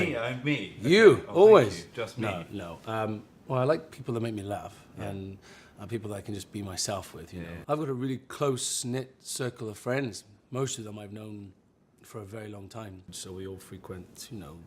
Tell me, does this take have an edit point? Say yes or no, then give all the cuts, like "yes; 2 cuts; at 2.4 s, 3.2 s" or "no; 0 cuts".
no; 0 cuts